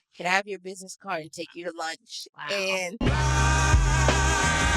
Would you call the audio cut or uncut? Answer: cut